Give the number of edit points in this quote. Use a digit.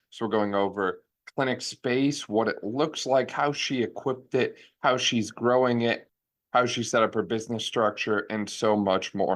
1